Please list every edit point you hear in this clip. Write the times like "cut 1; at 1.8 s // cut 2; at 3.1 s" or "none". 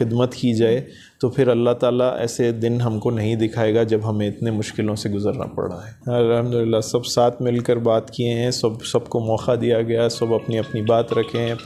none